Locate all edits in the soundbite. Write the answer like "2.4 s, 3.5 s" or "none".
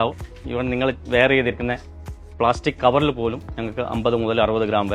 none